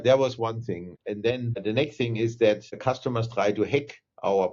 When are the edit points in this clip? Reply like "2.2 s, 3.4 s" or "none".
1.5 s, 2.7 s